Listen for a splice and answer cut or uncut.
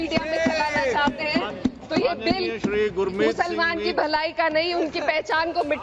uncut